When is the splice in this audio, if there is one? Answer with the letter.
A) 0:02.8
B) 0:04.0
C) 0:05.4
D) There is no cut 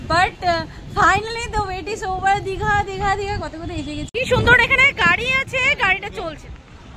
B